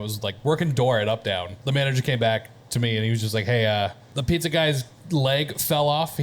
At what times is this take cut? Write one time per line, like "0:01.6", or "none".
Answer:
0:01.5
0:04.1